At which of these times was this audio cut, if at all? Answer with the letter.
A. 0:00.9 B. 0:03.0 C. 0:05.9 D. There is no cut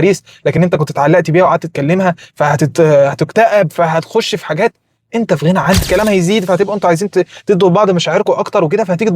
C